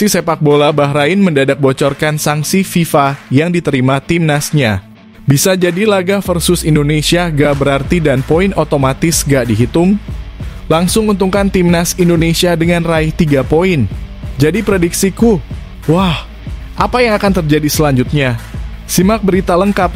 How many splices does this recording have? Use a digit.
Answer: 0